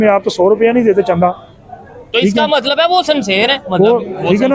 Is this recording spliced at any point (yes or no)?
no